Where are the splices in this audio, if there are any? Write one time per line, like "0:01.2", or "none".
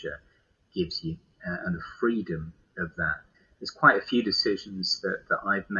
0:03.3